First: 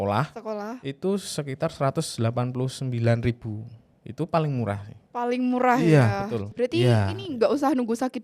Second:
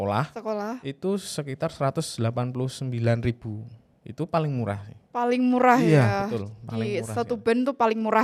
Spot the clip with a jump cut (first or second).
first